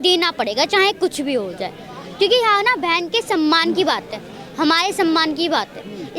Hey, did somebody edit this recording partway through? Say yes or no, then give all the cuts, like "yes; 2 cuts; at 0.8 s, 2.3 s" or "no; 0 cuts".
no; 0 cuts